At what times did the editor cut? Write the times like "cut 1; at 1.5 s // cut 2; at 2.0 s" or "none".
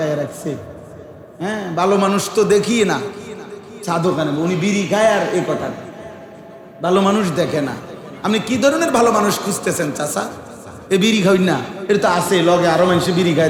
none